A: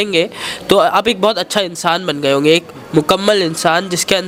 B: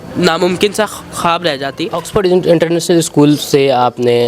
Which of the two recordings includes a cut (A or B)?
B